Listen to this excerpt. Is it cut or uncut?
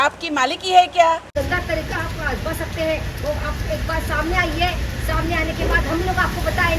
cut